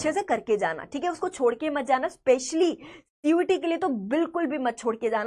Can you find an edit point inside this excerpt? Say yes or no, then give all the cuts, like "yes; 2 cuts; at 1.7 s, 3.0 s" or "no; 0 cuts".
no; 0 cuts